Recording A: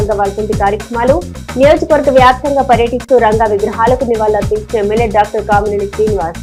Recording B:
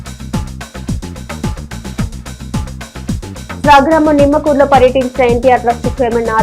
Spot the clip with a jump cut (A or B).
B